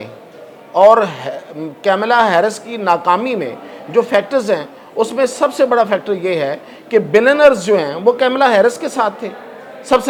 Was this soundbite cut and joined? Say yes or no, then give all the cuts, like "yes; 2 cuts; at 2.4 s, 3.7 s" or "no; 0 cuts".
no; 0 cuts